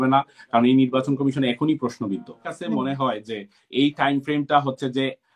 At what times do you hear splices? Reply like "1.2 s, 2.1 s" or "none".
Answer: 2.5 s